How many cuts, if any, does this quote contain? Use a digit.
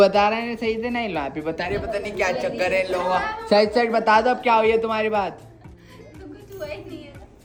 0